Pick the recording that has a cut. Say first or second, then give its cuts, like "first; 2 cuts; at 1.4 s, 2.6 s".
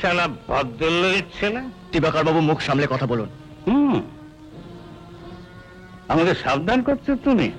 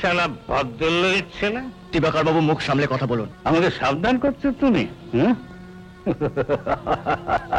second; 1 cut; at 3.3 s